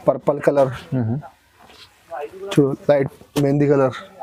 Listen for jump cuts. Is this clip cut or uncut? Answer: uncut